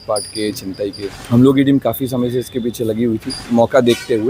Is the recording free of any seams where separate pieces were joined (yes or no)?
no